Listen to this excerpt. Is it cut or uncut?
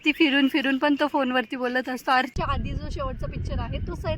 cut